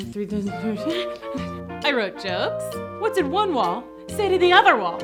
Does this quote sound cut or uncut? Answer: uncut